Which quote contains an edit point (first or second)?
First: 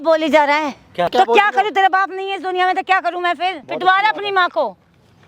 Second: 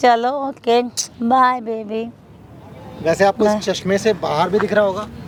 first